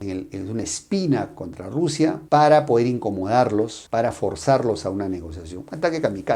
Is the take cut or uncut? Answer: uncut